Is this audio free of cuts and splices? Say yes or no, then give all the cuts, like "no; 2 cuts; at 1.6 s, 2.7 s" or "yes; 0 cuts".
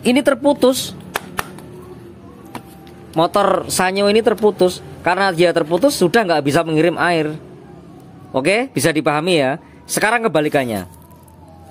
yes; 0 cuts